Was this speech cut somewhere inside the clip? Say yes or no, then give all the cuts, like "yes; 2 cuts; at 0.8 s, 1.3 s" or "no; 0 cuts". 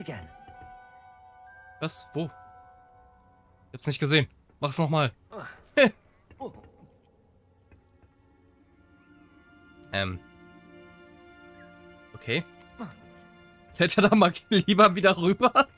no; 0 cuts